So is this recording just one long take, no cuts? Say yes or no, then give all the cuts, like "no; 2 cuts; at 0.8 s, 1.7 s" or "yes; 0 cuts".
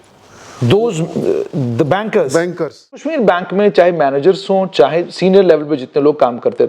no; 1 cut; at 3.1 s